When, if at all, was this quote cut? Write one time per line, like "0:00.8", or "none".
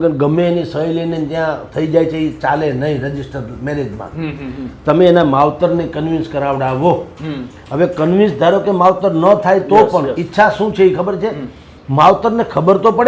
none